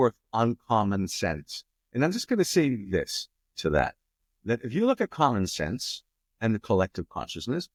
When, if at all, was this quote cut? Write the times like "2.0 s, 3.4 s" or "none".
none